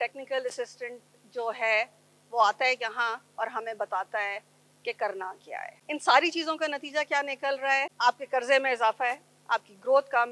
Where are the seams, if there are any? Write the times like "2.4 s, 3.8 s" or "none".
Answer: 5.7 s, 7.9 s

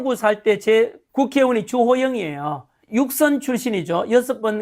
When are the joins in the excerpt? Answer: 1.0 s, 2.7 s

